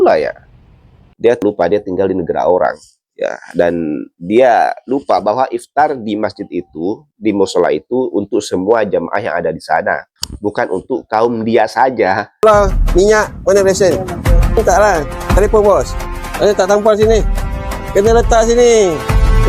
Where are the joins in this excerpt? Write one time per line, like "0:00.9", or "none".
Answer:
0:01.1
0:12.4